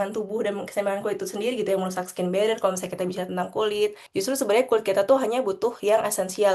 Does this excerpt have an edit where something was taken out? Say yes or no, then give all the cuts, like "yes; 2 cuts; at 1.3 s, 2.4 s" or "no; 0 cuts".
yes; 1 cut; at 4.0 s